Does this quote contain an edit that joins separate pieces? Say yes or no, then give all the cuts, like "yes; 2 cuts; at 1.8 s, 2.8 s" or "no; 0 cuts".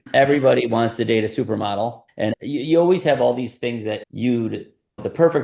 yes; 1 cut; at 2.3 s